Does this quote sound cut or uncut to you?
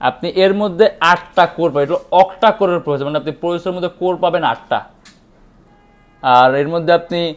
uncut